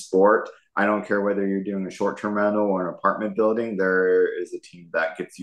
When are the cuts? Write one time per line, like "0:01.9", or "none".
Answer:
none